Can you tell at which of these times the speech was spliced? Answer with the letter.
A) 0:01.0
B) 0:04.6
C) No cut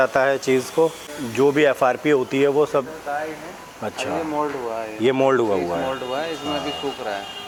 C